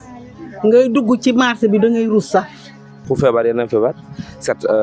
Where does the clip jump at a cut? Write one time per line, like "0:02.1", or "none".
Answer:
0:03.0